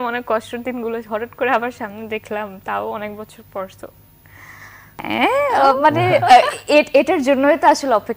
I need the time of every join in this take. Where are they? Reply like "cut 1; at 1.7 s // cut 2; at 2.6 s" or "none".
cut 1; at 5.0 s